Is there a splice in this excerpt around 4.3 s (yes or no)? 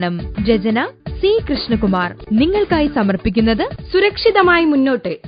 no